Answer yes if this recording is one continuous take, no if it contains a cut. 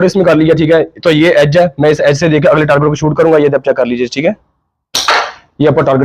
yes